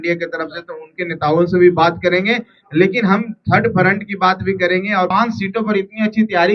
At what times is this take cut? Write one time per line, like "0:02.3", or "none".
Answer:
0:05.1